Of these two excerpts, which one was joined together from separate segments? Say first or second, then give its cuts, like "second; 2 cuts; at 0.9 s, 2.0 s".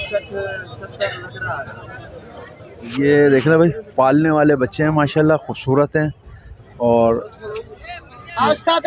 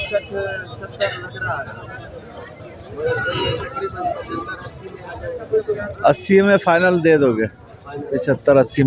first; 1 cut; at 3.0 s